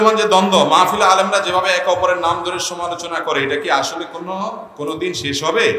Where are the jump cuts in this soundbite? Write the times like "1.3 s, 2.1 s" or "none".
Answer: none